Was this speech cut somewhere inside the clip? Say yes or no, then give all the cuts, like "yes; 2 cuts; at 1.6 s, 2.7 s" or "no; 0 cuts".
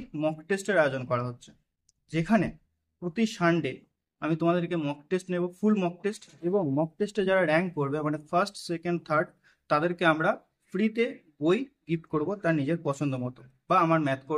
no; 0 cuts